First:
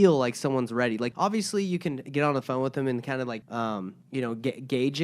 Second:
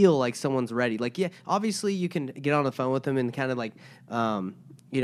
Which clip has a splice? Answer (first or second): first